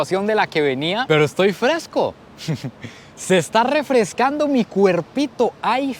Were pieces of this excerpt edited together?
no; 0 cuts

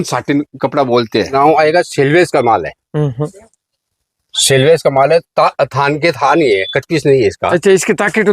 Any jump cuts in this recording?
yes; 1 cut; at 1.3 s

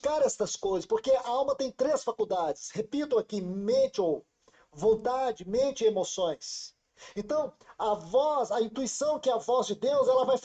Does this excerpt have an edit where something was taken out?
yes; 1 cut; at 2.6 s

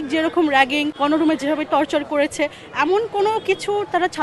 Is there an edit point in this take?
yes; 1 cut; at 0.9 s

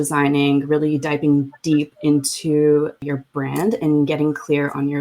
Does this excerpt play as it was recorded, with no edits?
no; 1 cut; at 3.0 s

